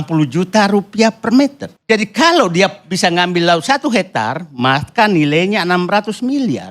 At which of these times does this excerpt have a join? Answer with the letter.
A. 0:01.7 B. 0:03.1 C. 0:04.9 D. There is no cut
A